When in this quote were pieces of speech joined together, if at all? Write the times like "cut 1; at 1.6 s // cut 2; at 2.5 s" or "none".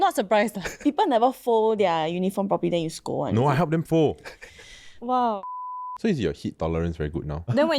cut 1; at 0.8 s // cut 2; at 5.4 s